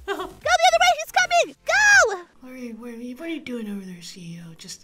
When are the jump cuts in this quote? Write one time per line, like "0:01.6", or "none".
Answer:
0:02.3